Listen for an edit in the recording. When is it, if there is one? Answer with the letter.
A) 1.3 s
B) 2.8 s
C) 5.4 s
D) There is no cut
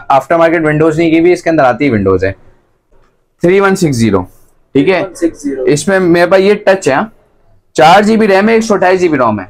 B